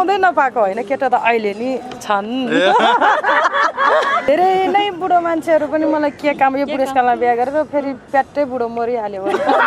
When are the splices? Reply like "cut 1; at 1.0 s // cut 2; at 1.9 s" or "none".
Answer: cut 1; at 4.3 s